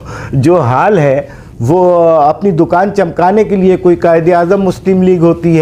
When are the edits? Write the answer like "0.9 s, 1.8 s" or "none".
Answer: none